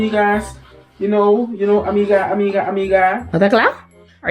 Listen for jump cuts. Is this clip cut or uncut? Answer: cut